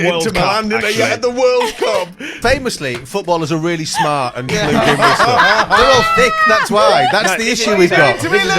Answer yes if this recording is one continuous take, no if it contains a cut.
no